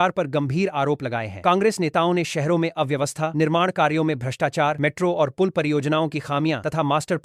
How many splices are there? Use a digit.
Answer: 0